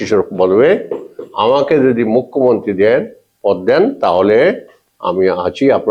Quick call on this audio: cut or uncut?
uncut